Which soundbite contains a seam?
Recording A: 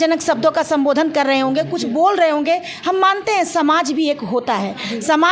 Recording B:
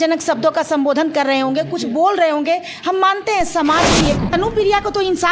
B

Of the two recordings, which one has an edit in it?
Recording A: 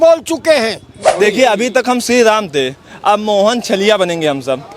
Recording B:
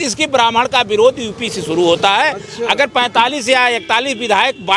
A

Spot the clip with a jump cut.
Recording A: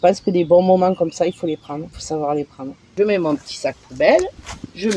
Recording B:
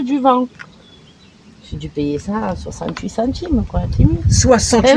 A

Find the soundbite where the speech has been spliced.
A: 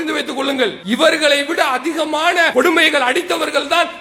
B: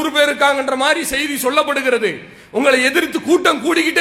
A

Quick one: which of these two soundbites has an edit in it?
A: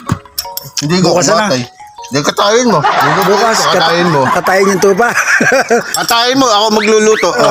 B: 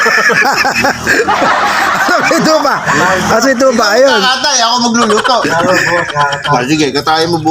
B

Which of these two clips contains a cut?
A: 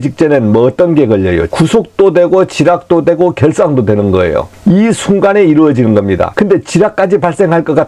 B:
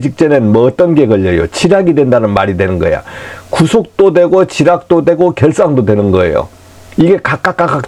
A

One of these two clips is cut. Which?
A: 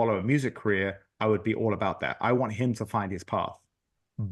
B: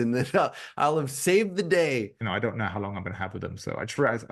B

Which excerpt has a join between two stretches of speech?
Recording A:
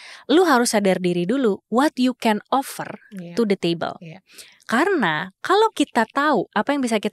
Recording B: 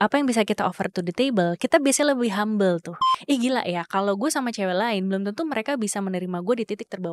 B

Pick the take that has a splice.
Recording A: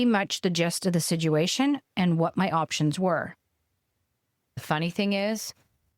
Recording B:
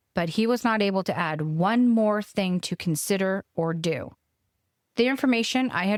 A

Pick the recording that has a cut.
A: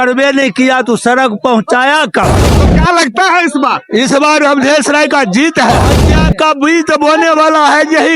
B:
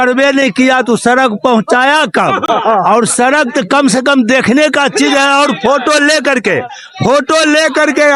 A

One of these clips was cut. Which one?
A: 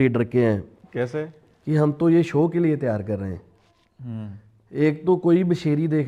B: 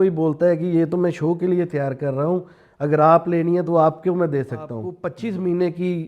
B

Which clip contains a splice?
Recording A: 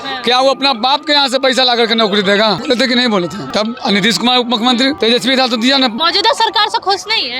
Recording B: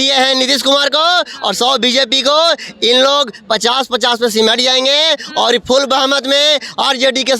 A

